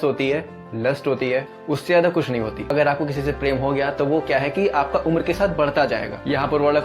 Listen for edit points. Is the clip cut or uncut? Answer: cut